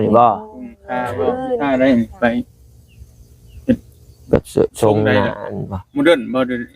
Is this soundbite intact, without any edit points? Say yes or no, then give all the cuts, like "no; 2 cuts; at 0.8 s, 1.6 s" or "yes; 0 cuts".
no; 1 cut; at 1.5 s